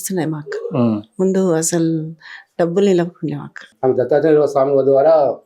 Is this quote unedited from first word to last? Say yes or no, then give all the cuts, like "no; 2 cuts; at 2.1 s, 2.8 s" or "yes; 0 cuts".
no; 1 cut; at 3.7 s